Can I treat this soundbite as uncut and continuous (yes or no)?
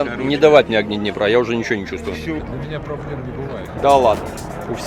no